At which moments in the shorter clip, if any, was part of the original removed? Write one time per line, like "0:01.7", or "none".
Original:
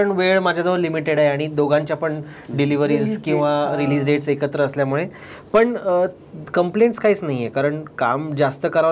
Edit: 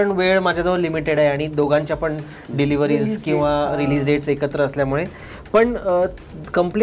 none